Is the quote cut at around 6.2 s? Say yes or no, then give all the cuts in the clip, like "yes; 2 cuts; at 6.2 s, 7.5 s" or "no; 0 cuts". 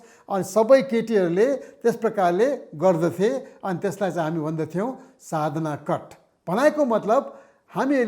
no; 0 cuts